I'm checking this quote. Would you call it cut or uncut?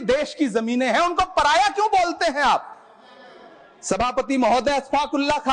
uncut